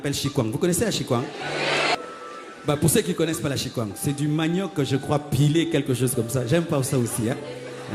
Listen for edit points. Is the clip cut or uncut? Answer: cut